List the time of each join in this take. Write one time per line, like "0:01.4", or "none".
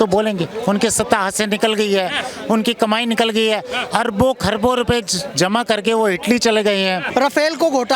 0:07.0